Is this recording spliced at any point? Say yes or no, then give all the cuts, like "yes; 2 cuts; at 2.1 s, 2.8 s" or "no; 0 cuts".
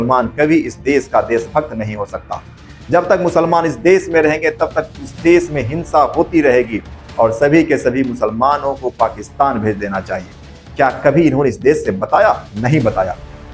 no; 0 cuts